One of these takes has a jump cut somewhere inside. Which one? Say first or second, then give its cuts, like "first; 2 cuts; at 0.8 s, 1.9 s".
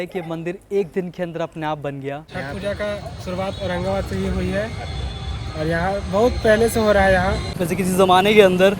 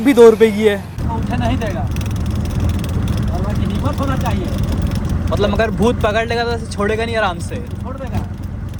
first; 2 cuts; at 2.2 s, 7.5 s